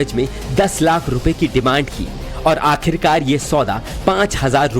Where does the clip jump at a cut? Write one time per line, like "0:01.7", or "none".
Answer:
0:03.9